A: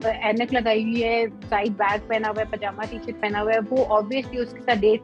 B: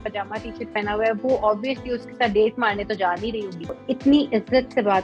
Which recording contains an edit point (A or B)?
B